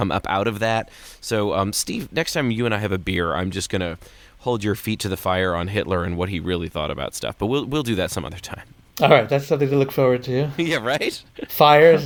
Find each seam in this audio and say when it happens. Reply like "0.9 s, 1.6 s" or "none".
none